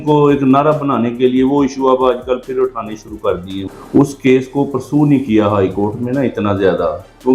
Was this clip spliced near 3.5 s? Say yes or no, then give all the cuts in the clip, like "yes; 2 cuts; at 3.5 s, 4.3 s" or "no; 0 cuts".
yes; 1 cut; at 3.5 s